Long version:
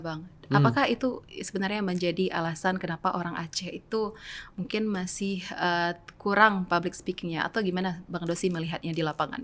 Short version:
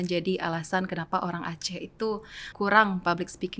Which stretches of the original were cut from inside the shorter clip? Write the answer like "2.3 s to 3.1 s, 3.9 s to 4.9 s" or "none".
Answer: 4.3 s to 6.1 s